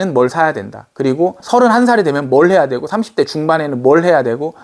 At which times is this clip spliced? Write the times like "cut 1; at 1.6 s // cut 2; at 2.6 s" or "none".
cut 1; at 1.4 s